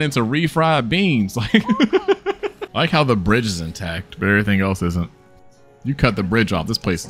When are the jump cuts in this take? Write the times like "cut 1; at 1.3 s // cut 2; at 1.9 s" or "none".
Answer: cut 1; at 2.6 s